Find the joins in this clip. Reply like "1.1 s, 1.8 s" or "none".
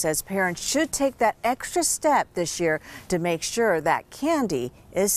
none